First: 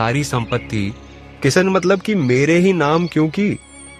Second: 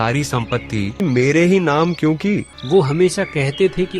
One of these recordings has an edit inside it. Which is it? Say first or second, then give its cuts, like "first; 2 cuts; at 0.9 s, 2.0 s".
second; 2 cuts; at 1.0 s, 2.5 s